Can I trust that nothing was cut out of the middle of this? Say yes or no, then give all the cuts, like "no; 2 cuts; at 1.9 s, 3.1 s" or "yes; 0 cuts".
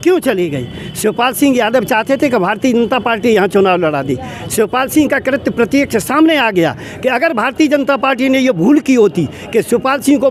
yes; 0 cuts